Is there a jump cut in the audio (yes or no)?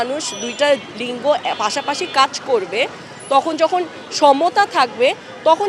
no